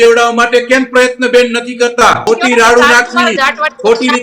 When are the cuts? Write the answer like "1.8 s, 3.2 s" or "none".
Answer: 2.2 s